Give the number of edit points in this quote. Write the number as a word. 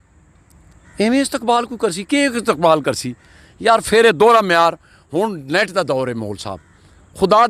zero